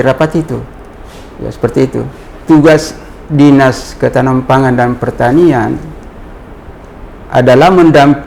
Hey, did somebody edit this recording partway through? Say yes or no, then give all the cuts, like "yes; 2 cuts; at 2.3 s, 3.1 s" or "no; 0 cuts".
no; 0 cuts